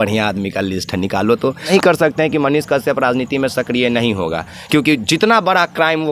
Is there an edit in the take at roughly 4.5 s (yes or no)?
no